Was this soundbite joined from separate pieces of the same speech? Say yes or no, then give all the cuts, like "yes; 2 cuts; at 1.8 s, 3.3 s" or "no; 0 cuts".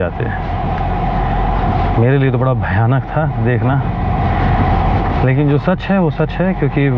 no; 0 cuts